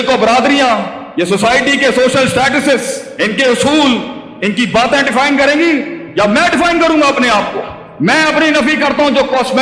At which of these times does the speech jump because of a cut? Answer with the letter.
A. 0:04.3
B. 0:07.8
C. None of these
B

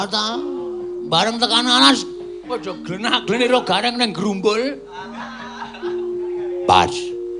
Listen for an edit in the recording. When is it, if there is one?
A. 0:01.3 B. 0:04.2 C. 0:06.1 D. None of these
B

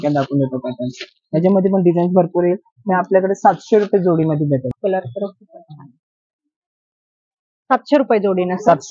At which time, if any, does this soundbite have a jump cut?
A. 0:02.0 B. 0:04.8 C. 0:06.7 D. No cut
B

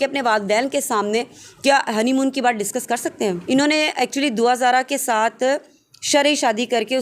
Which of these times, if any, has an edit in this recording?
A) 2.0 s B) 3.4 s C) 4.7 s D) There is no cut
B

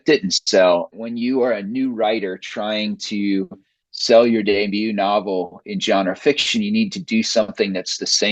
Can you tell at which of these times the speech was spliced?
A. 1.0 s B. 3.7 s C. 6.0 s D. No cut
A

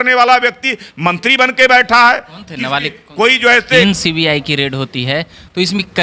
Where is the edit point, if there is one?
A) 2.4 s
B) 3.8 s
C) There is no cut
B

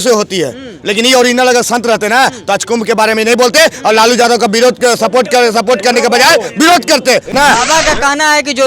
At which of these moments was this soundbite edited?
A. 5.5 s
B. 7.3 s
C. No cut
B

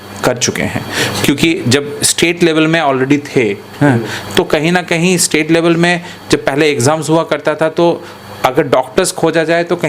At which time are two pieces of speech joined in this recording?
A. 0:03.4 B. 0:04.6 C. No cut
C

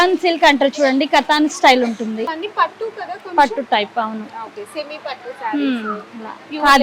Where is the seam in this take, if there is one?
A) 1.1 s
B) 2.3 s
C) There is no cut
B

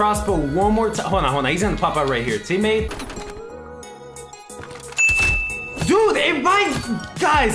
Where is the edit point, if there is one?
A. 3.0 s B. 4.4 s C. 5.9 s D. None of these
A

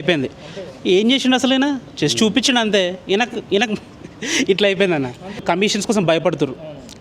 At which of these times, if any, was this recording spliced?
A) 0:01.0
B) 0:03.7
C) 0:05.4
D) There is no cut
C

